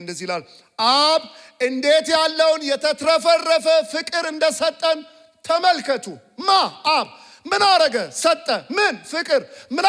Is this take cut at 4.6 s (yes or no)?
no